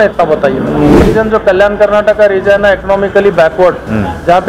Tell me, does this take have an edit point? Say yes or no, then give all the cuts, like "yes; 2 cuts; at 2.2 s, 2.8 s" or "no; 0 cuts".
yes; 1 cut; at 1.0 s